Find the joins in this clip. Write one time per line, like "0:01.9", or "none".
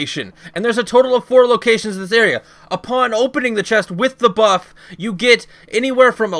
none